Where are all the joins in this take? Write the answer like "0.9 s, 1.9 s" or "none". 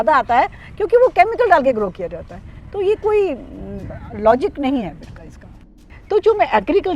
5.7 s

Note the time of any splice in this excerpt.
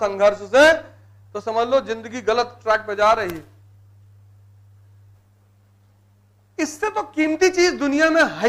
5.2 s

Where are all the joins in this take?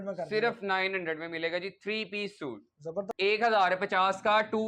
3.1 s

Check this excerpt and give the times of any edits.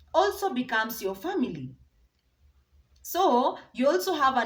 none

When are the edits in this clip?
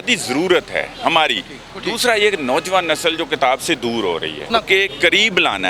1.6 s, 4.5 s

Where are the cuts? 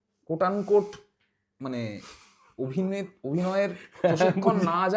none

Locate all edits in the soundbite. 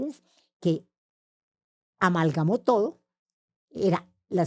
none

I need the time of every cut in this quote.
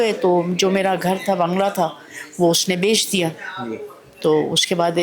none

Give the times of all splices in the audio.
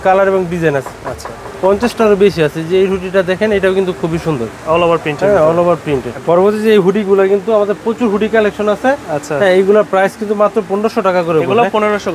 none

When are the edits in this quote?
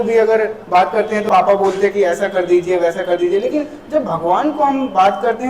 1.3 s

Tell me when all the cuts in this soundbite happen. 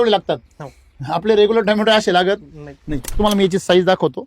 3.2 s

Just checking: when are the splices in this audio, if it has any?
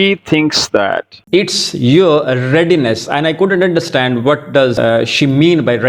1.1 s, 4.8 s

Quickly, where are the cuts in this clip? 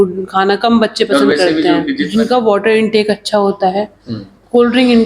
2.0 s

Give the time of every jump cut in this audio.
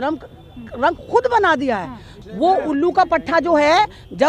2.1 s

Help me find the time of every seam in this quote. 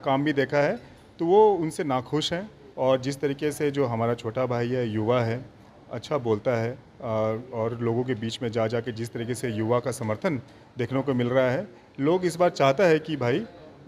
2.6 s

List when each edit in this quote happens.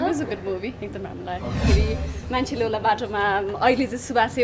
1.6 s

